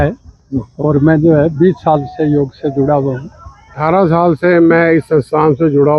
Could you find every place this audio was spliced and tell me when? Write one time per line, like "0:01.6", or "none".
0:03.8